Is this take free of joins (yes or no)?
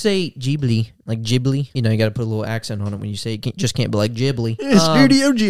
no